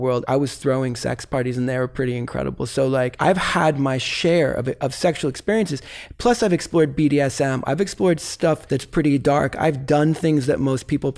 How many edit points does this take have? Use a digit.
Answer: 2